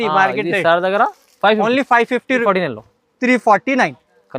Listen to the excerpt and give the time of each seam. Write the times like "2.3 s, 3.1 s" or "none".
2.4 s